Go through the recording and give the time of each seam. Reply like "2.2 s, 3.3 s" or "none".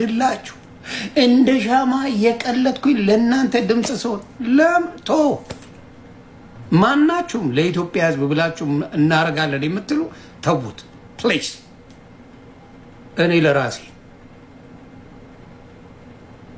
none